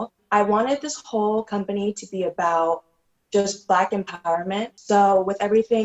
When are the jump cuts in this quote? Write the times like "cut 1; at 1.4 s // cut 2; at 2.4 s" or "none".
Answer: cut 1; at 4.7 s